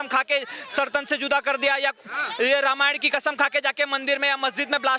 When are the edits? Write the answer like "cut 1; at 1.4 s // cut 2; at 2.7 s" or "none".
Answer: none